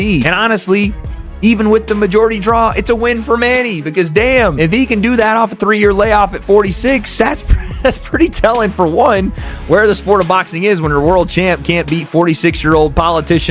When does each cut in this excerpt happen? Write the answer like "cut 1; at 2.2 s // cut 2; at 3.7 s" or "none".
none